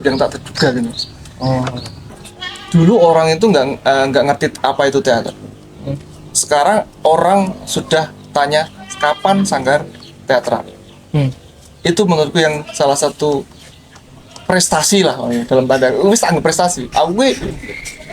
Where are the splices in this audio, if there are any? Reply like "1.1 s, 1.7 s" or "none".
2.1 s